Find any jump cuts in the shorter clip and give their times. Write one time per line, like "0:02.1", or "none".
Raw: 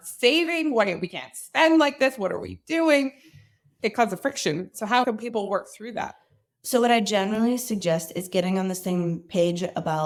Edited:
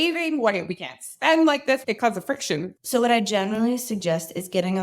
0:01.8
0:02.8